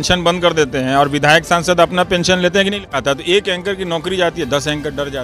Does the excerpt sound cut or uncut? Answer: cut